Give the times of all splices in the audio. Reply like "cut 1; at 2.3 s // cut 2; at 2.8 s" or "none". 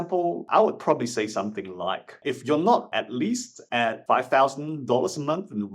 cut 1; at 2.2 s // cut 2; at 4.0 s